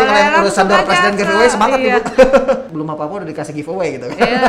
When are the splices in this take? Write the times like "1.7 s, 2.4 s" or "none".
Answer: 2.7 s